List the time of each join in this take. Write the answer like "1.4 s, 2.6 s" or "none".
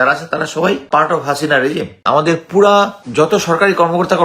0.8 s, 2.0 s, 3.0 s